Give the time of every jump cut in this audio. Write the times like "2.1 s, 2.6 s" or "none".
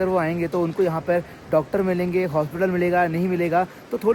none